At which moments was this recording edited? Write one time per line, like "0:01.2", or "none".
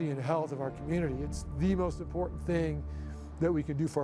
none